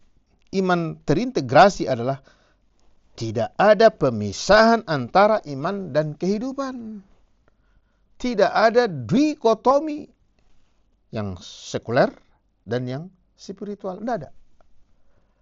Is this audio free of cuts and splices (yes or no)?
yes